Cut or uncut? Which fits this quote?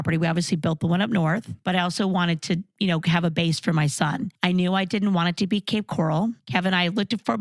cut